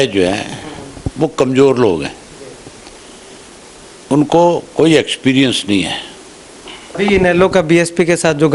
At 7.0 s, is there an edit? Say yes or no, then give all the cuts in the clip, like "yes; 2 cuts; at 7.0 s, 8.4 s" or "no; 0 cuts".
yes; 1 cut; at 7.0 s